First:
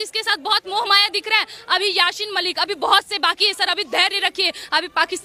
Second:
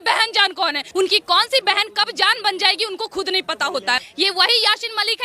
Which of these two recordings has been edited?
second; 2 cuts; at 0.8 s, 4.1 s

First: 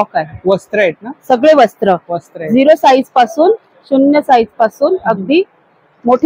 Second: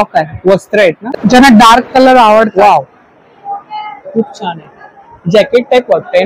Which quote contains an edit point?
second; 1 cut; at 1.1 s

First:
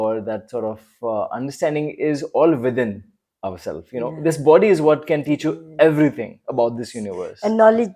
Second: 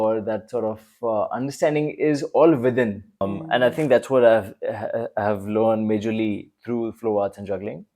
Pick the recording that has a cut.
second; 1 cut; at 3.3 s

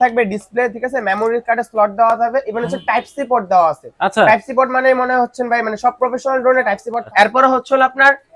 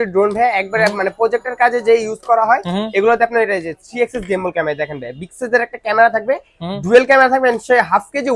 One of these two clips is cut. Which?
first; 1 cut; at 7.0 s

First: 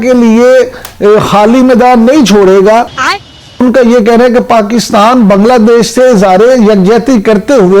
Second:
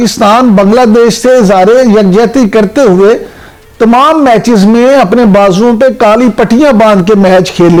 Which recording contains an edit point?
first; 1 cut; at 3.4 s

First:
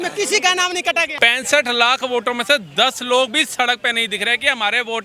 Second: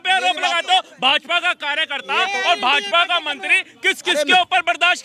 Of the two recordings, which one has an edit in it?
first; 1 cut; at 1.1 s

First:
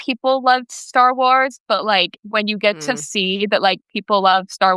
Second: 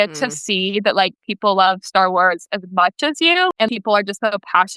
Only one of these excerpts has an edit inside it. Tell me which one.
second; 1 cut; at 3.5 s

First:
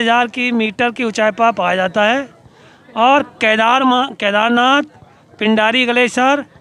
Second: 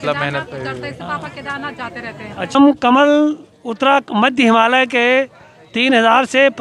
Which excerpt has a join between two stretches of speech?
second; 1 cut; at 2.6 s

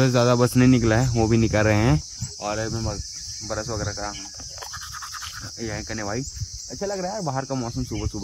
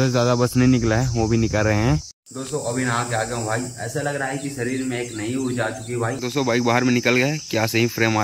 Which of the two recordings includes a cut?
second; 2 cuts; at 2.2 s, 6.2 s

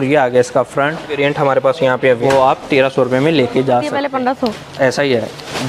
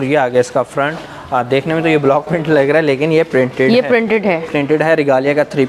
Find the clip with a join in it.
first; 3 cuts; at 1.1 s, 2.2 s, 4.0 s

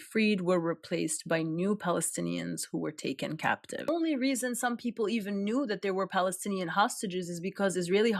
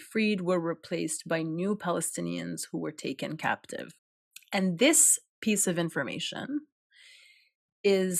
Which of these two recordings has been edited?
first; 1 cut; at 3.9 s

